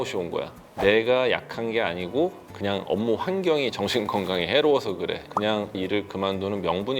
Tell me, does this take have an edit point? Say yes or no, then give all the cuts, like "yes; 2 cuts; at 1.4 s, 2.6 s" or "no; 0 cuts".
yes; 1 cut; at 5.2 s